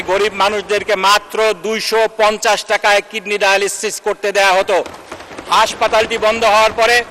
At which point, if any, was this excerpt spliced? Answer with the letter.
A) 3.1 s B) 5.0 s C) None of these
C